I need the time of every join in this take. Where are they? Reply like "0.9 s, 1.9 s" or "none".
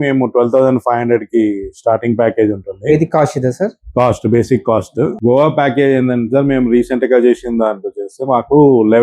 5.1 s